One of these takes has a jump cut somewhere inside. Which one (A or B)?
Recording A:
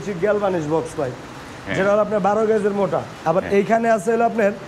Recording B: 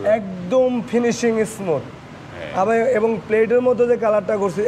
A